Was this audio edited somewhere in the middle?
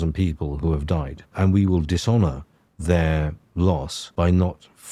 yes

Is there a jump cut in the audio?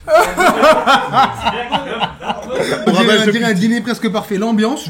yes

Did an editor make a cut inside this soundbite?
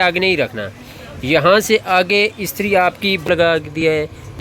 yes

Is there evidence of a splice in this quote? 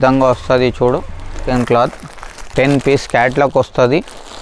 yes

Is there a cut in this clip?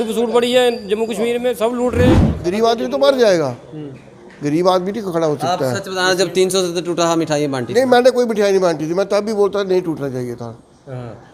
yes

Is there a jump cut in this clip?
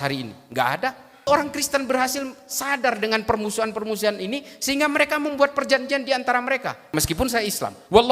yes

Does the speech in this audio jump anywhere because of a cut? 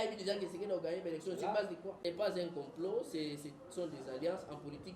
yes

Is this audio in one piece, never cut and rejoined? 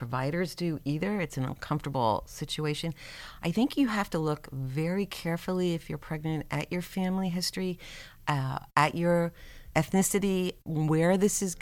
no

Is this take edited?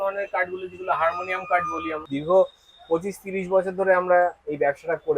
yes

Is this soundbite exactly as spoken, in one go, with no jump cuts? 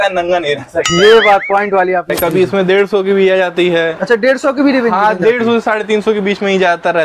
no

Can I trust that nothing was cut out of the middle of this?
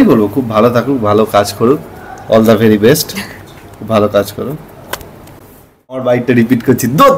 no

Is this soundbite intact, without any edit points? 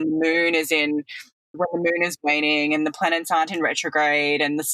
no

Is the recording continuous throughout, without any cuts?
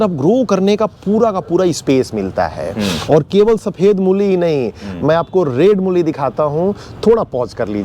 yes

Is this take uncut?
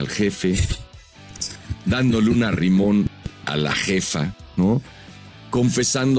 yes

